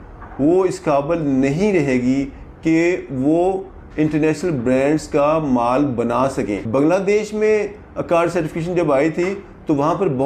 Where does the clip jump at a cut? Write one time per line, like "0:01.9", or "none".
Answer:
0:06.6